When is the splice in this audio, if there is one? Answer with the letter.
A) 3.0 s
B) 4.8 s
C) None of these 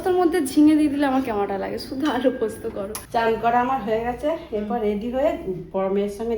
A